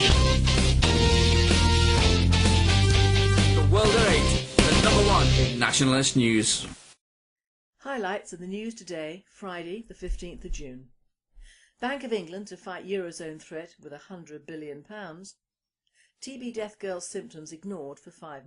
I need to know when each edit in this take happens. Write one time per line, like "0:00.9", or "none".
0:04.7